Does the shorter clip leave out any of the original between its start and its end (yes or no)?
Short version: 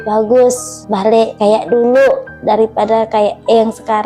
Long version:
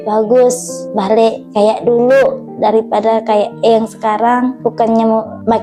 yes